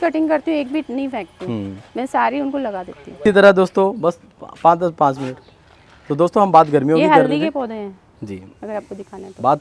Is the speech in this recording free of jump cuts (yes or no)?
yes